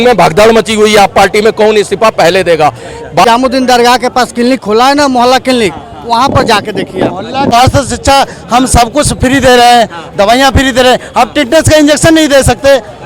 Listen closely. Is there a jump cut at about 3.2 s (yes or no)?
yes